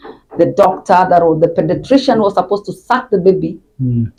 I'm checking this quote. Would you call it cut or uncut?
uncut